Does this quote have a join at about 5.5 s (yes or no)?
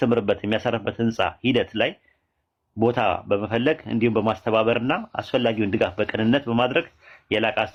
no